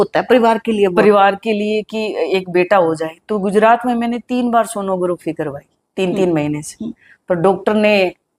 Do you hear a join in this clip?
no; 0 cuts

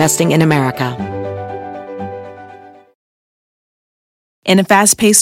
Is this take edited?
yes; 1 cut; at 0.9 s

